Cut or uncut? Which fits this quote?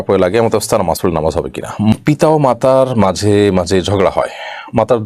cut